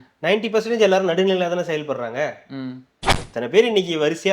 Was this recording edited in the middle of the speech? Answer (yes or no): yes